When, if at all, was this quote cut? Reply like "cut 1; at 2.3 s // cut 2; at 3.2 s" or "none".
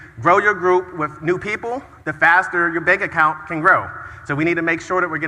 none